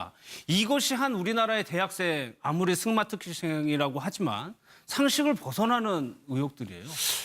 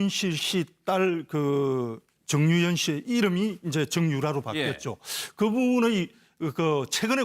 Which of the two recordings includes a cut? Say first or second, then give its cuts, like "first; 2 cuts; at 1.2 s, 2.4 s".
first; 1 cut; at 2.2 s